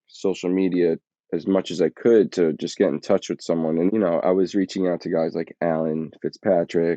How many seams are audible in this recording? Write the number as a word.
one